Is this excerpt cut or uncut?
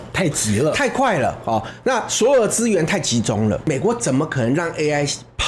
cut